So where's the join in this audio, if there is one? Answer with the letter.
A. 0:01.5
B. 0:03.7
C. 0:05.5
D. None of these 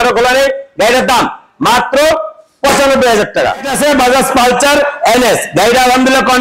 B